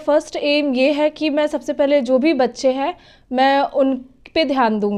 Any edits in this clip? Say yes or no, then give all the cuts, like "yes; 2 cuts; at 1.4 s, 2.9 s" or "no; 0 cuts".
no; 0 cuts